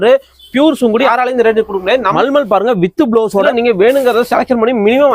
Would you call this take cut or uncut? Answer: cut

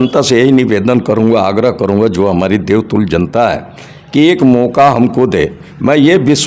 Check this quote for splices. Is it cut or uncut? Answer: uncut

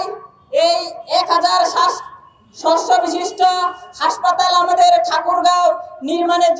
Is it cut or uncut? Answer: uncut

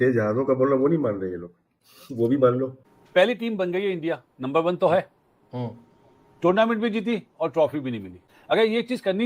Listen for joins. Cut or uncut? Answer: cut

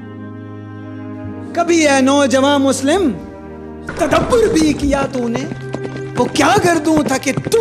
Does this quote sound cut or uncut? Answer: cut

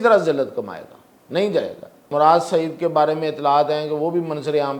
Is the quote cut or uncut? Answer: cut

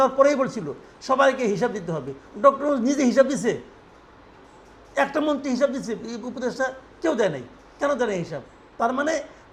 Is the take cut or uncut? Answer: uncut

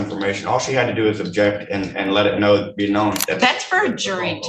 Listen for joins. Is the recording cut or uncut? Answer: cut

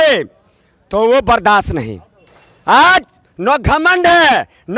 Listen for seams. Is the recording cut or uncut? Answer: uncut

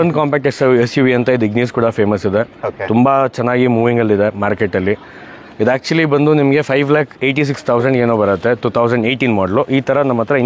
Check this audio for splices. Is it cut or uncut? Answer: uncut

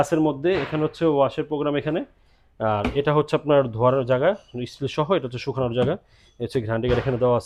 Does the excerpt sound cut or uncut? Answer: uncut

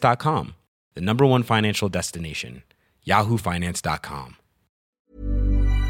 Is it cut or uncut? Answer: cut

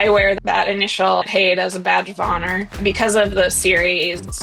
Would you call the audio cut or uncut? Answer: cut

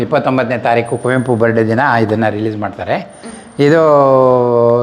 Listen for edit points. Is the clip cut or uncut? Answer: uncut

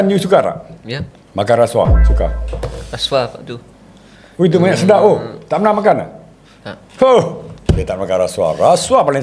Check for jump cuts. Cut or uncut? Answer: uncut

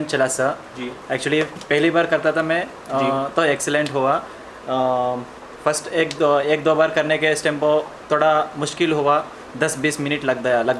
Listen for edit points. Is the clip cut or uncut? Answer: uncut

